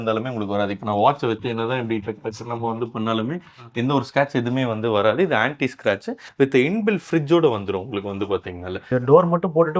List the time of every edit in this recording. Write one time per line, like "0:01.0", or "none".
0:06.2
0:08.9